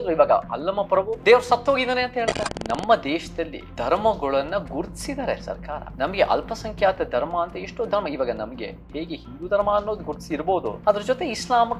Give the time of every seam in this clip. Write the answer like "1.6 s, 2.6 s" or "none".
1.1 s, 2.5 s, 3.6 s, 5.9 s, 10.7 s